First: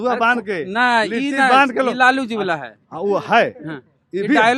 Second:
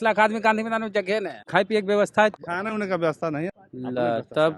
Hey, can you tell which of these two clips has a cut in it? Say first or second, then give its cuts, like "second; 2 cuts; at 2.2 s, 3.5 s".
second; 3 cuts; at 1.3 s, 2.3 s, 3.5 s